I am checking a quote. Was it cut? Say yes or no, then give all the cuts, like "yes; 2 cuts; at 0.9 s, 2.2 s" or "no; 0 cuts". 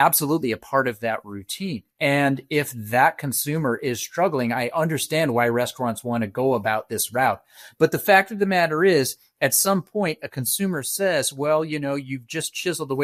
no; 0 cuts